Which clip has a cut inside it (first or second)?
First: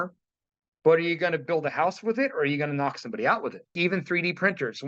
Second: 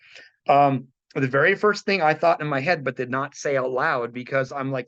first